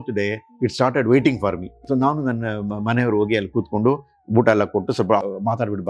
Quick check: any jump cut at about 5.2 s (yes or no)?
yes